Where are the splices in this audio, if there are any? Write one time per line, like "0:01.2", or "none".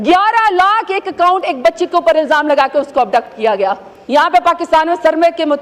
0:03.9